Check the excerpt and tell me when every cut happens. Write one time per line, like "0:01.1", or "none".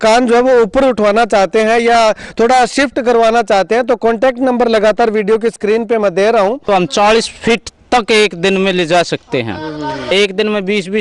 0:06.6
0:10.1